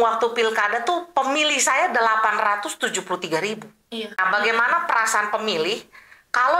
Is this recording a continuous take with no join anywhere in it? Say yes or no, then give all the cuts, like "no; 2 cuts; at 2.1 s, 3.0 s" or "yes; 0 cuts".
no; 1 cut; at 4.1 s